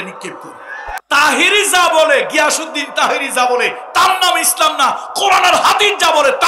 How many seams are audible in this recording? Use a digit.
1